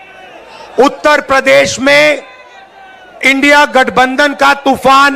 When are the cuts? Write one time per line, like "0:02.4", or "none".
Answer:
none